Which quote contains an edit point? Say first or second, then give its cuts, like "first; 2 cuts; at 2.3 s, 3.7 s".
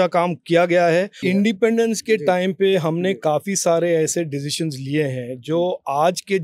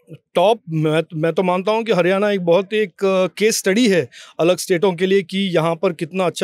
first; 1 cut; at 1.2 s